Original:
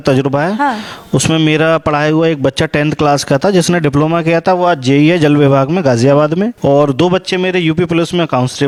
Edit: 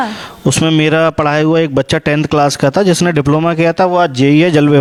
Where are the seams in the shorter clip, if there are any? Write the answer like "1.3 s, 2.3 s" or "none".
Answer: none